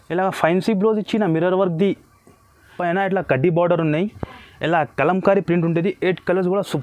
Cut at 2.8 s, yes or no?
yes